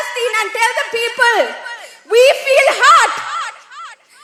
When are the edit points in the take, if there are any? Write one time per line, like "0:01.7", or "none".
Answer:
none